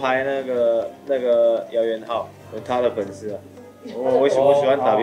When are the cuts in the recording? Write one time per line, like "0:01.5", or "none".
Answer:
0:02.5